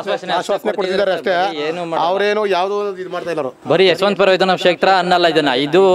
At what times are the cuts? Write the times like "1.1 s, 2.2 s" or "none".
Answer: none